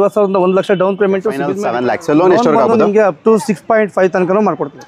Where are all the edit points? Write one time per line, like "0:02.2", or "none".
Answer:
0:01.5